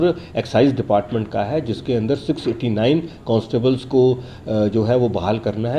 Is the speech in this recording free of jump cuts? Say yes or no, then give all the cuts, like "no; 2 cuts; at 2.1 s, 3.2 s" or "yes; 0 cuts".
yes; 0 cuts